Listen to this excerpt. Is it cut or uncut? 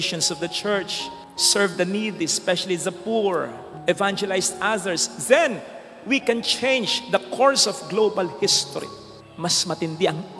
uncut